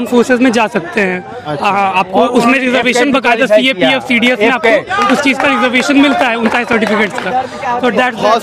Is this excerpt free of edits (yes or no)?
yes